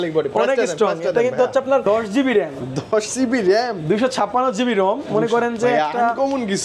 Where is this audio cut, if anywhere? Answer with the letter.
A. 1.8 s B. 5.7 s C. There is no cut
A